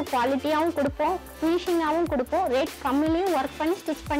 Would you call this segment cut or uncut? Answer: uncut